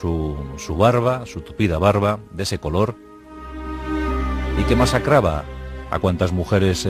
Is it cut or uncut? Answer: cut